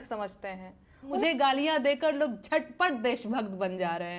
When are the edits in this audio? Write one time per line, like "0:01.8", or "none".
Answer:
0:01.2